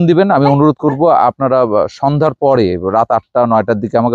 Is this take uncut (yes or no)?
yes